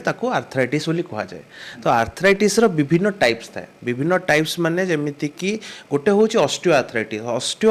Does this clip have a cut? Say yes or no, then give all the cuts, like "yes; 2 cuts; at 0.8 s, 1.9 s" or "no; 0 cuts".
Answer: no; 0 cuts